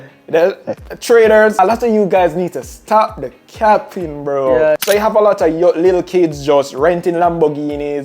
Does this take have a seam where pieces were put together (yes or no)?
yes